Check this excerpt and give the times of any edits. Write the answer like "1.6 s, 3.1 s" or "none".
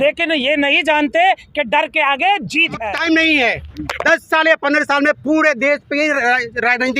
2.9 s